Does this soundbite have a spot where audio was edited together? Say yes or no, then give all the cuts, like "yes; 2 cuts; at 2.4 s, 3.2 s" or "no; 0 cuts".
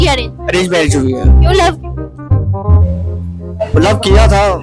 no; 0 cuts